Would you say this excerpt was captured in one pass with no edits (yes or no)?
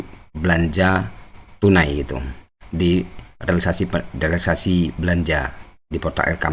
yes